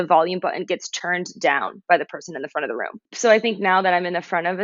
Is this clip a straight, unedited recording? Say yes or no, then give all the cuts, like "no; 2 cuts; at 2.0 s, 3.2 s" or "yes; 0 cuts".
no; 1 cut; at 3.0 s